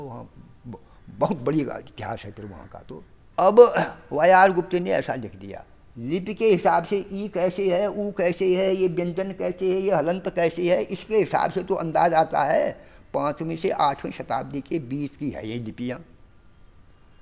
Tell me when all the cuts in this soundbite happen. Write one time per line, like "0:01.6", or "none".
0:03.2